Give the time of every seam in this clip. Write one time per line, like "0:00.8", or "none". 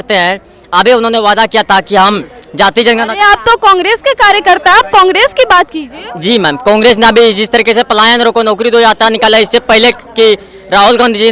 none